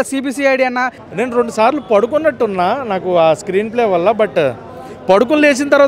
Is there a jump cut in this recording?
yes; 1 cut; at 1.0 s

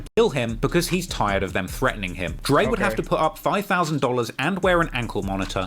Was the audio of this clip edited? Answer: yes; 1 cut; at 2.4 s

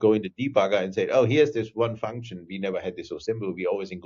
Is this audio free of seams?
yes; 0 cuts

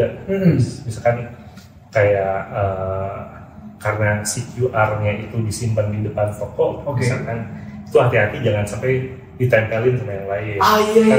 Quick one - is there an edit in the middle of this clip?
no; 0 cuts

